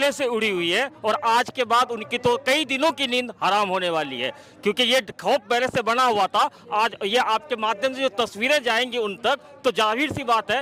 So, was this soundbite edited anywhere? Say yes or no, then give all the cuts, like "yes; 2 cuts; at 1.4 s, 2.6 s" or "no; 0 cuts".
no; 0 cuts